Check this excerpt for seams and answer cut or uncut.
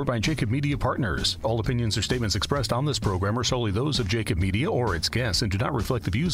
cut